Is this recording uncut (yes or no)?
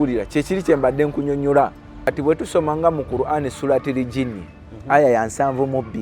no